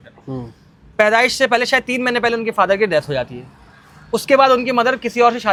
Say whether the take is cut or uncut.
uncut